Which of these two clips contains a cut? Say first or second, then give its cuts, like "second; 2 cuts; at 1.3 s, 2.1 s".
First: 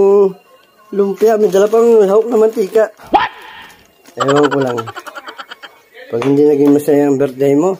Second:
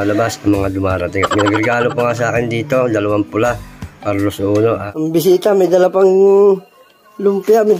second; 1 cut; at 4.9 s